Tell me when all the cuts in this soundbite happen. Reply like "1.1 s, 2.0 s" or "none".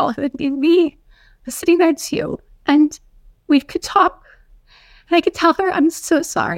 none